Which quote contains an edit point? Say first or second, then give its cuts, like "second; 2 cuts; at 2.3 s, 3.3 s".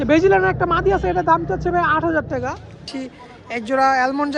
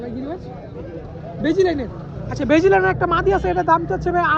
first; 1 cut; at 2.9 s